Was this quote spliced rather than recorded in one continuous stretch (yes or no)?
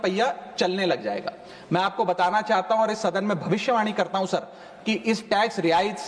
no